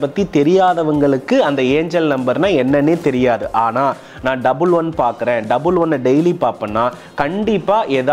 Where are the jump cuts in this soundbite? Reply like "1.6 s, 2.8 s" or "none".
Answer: none